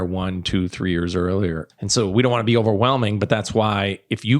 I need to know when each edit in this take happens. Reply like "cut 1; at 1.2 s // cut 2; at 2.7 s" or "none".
cut 1; at 1.6 s

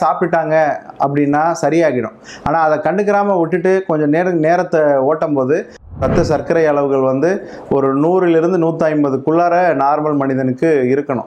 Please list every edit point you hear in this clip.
cut 1; at 5.9 s

